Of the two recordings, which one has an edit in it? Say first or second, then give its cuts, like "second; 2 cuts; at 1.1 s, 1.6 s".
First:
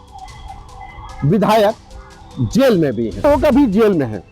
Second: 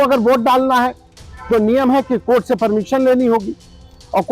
first; 1 cut; at 3.2 s